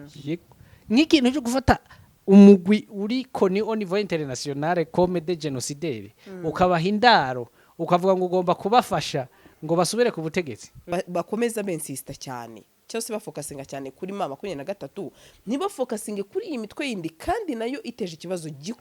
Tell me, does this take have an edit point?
yes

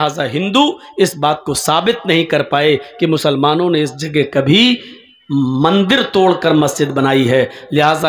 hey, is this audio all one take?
yes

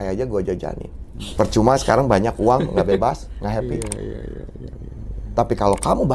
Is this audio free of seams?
no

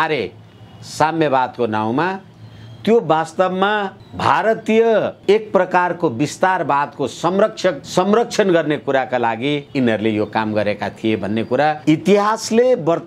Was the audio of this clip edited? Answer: yes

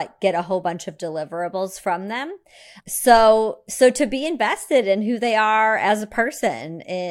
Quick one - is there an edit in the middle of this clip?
no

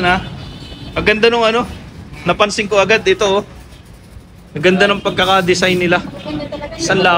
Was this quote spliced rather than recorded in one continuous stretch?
no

